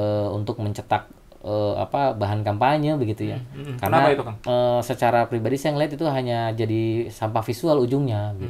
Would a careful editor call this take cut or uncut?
uncut